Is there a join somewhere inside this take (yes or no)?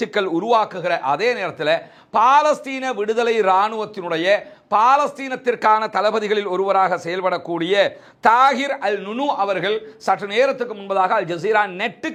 no